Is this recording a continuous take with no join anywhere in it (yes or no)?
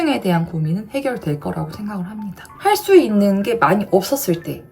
no